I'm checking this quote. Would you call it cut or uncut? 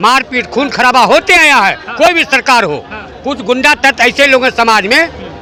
uncut